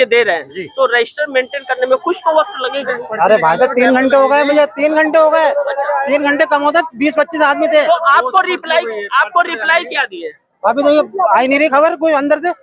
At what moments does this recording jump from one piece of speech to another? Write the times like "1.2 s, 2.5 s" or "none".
none